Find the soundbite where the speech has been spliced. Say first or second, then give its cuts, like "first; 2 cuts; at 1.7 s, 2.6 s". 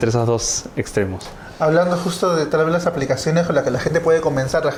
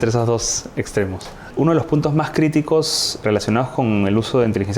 second; 2 cuts; at 1.5 s, 3.2 s